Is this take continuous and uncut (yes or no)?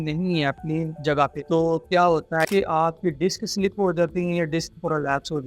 no